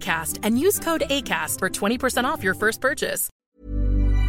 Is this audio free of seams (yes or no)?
no